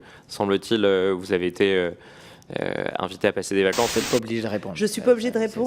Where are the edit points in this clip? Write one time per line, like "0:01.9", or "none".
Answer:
0:03.9